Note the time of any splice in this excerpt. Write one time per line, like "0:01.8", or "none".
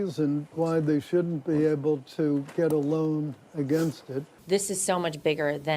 0:04.3